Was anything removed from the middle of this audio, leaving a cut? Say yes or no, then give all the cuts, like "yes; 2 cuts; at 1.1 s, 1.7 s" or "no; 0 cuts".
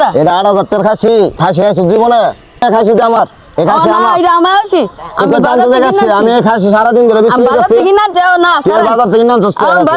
yes; 1 cut; at 2.6 s